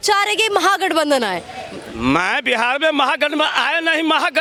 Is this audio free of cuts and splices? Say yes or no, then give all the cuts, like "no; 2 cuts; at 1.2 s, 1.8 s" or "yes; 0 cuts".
yes; 0 cuts